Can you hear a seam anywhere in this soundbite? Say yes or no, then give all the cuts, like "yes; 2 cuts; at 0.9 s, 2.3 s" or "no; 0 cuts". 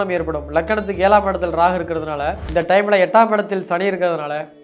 yes; 1 cut; at 2.4 s